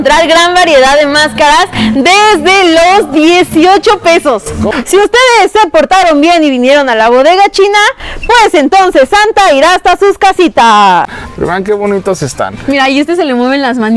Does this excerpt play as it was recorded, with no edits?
no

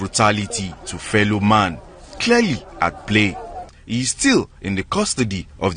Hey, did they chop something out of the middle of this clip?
yes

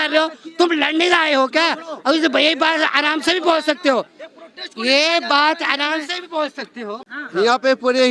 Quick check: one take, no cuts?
no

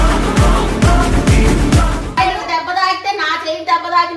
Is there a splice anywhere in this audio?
yes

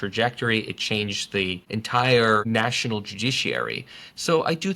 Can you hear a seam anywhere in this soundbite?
yes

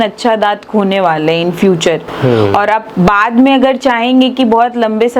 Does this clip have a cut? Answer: no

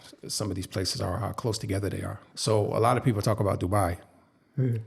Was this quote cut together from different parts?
yes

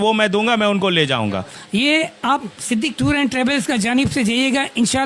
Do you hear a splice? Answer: yes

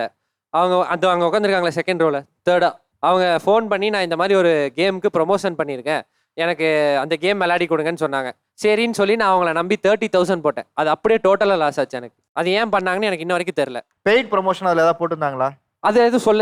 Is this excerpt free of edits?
yes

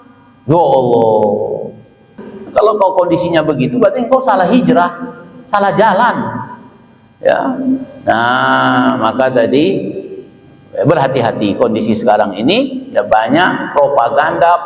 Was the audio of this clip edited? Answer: yes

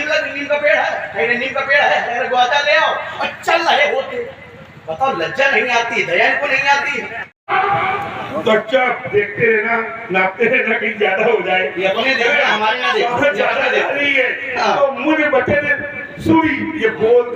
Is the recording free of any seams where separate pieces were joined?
no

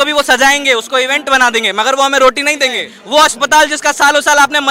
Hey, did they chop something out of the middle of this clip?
yes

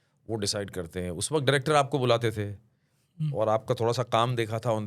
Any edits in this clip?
no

